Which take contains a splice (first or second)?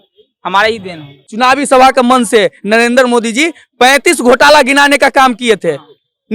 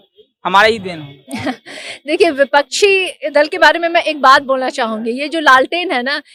first